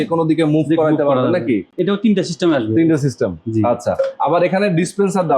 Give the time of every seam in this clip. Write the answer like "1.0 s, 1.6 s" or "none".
none

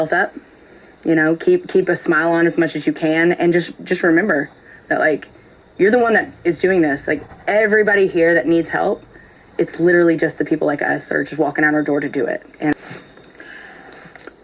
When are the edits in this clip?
12.7 s

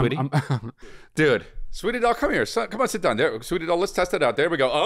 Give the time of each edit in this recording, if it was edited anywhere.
1.0 s

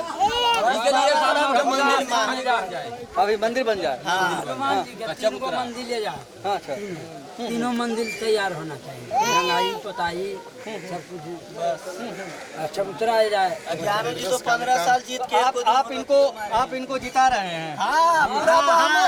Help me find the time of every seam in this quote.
none

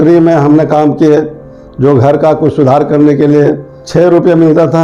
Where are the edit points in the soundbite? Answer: 3.7 s

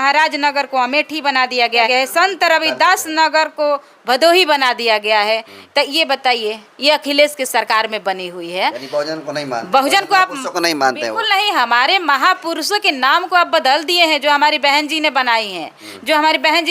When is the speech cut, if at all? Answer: 1.9 s

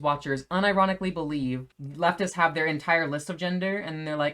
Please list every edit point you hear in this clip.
1.6 s

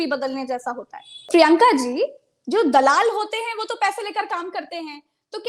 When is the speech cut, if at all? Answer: 1.3 s

